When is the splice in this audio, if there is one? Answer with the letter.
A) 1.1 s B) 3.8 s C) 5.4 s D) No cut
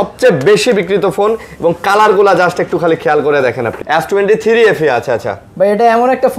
B